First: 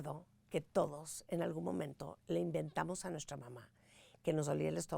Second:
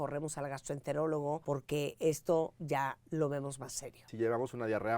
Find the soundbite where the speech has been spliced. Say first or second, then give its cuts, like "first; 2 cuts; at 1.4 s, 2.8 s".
second; 3 cuts; at 1.4 s, 2.6 s, 4.1 s